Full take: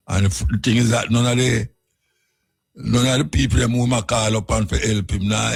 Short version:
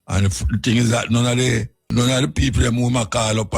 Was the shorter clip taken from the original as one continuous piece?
no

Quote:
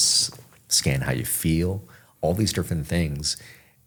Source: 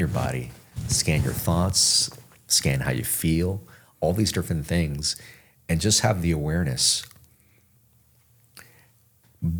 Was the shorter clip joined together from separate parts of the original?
no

